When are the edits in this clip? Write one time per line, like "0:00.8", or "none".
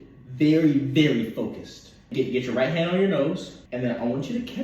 0:02.1
0:03.6